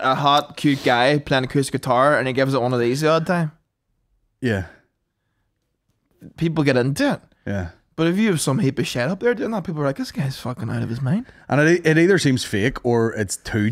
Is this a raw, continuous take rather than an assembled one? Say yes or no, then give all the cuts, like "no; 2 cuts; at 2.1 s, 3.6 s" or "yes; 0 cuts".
yes; 0 cuts